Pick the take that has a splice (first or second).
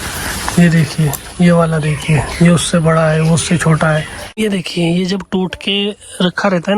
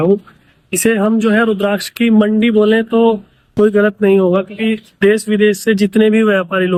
first